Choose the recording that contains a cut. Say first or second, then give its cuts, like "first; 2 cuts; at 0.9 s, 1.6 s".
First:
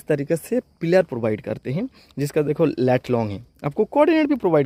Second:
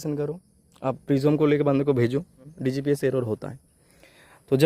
second; 1 cut; at 2.6 s